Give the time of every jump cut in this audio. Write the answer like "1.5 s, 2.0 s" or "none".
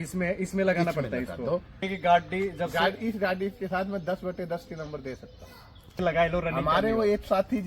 1.8 s, 6.0 s